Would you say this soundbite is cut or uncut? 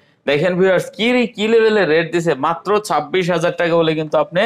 uncut